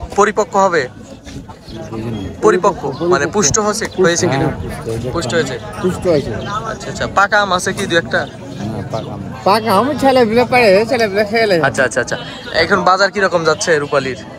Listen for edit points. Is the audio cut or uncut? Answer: uncut